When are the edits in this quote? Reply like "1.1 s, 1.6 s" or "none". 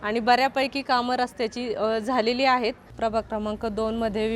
2.9 s